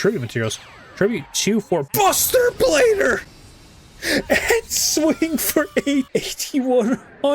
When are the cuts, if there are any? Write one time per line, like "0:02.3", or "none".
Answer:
0:01.9
0:06.1